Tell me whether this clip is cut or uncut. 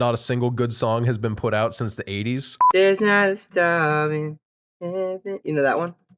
cut